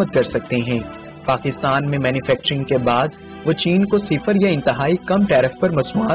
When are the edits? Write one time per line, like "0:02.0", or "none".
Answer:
none

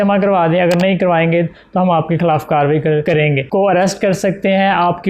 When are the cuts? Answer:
0:03.5

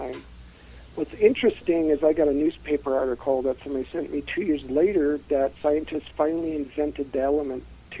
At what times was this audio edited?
0:06.3

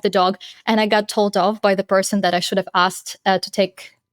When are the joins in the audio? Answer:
none

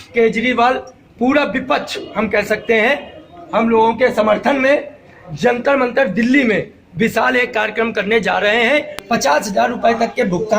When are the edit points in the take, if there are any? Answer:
0:09.0

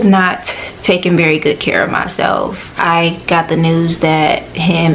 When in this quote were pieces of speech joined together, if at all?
0:02.7

